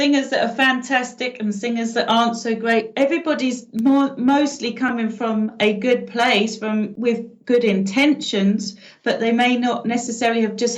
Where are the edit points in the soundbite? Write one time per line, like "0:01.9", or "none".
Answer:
0:06.9